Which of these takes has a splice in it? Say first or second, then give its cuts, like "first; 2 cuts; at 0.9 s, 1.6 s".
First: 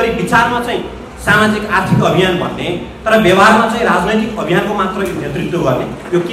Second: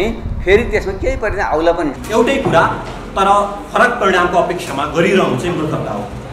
second; 1 cut; at 1.9 s